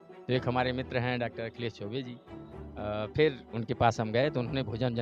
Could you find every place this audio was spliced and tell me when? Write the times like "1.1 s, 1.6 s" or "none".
none